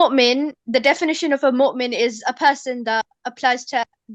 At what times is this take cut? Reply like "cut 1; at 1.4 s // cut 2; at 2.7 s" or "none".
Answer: none